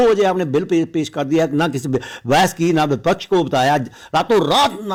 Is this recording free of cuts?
yes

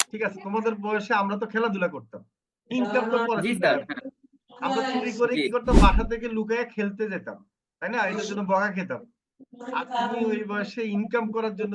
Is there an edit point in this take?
no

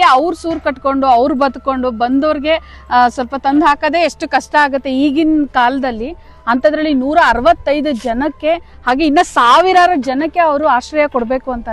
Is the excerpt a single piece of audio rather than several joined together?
yes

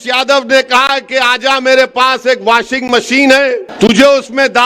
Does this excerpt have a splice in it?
yes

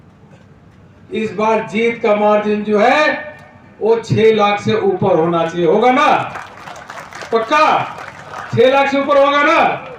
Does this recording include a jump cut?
no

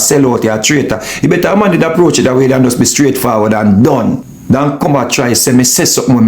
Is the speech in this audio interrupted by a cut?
yes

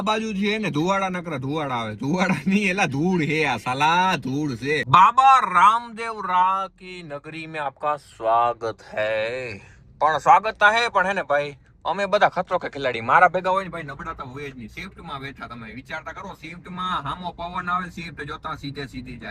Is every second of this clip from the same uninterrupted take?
yes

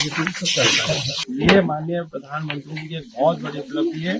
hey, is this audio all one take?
no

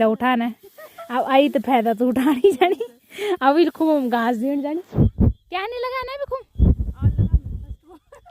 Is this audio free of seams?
yes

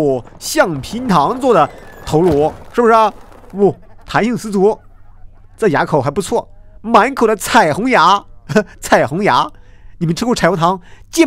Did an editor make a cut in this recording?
no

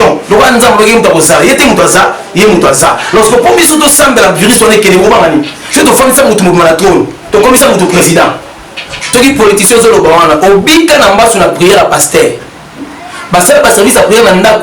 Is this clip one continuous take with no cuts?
no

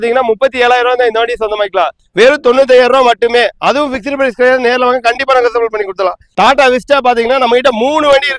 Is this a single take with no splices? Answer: no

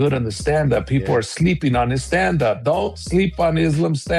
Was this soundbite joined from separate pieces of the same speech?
no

